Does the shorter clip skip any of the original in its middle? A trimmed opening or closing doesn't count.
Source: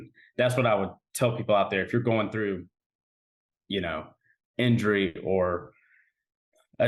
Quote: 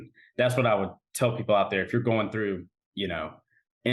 yes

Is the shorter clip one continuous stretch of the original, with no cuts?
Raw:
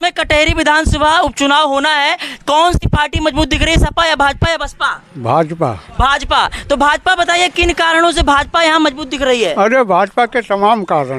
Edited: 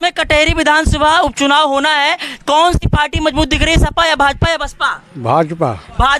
yes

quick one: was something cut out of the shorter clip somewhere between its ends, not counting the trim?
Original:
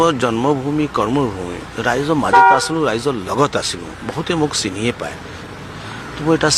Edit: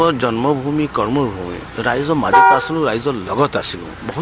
no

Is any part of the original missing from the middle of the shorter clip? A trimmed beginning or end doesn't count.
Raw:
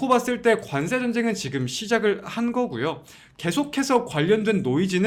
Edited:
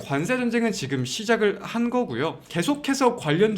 yes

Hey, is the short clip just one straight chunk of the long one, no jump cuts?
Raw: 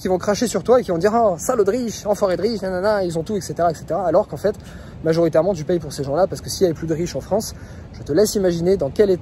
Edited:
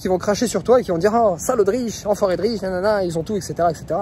yes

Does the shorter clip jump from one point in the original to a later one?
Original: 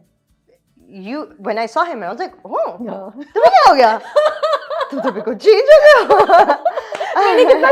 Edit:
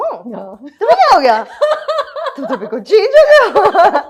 no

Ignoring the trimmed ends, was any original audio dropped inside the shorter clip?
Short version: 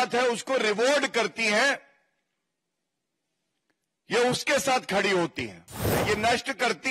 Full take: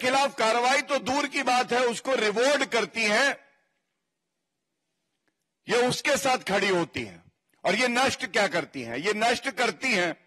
yes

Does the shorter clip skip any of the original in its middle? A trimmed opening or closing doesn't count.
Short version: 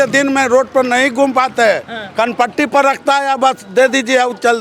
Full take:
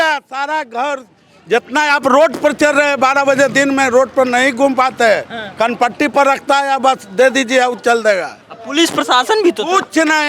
no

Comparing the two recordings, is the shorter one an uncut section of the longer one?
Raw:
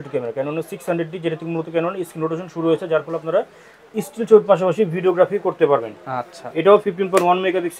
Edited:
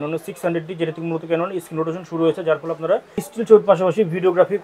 no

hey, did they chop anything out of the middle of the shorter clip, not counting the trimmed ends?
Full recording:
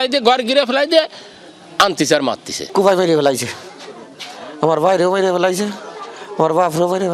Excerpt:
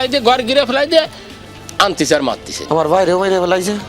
yes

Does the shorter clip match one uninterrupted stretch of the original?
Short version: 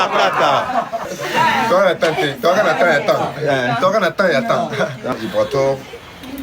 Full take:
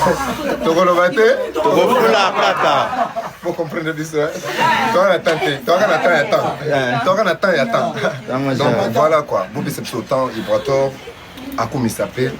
no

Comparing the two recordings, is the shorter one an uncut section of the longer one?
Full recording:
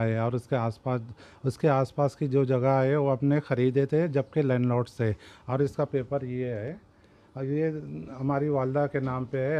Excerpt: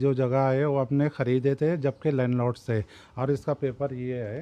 yes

